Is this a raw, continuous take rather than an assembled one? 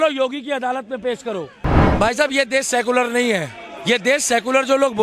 no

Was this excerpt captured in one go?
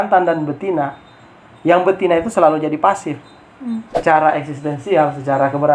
no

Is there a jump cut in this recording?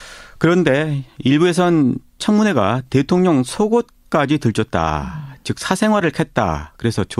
yes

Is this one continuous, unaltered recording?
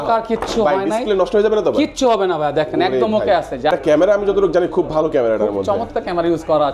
no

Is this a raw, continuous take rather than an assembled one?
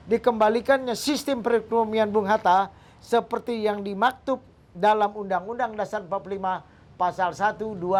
yes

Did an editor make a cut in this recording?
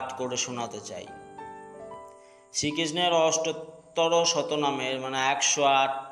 no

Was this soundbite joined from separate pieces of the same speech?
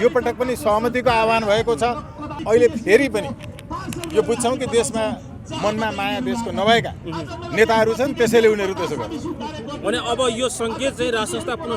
yes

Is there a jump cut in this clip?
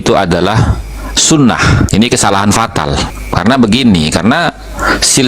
yes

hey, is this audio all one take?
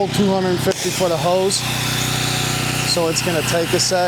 yes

